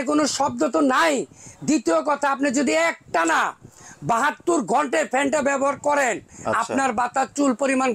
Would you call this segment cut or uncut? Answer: uncut